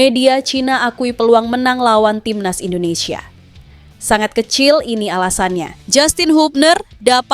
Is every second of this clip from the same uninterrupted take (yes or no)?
no